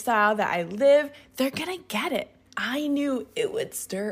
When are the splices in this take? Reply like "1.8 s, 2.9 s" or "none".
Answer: 2.4 s